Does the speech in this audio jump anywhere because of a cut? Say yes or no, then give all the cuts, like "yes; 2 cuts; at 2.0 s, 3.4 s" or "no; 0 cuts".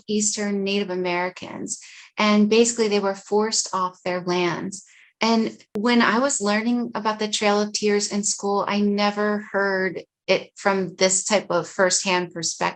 yes; 1 cut; at 5.7 s